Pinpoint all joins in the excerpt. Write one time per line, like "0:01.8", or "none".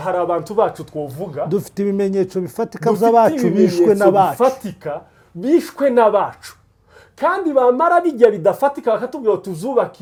none